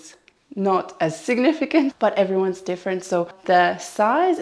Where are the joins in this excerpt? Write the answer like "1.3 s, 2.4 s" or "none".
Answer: 2.0 s, 3.3 s